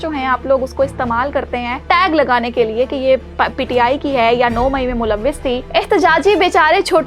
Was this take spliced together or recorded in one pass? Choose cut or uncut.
cut